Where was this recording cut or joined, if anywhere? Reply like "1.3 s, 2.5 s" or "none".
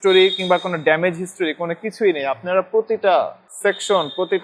3.4 s